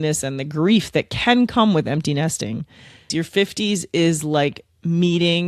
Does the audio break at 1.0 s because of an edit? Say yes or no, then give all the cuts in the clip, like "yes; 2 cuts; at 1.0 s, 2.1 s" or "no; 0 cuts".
no; 1 cut; at 2.8 s